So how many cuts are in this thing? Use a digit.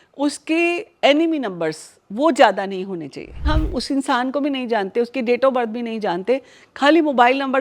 1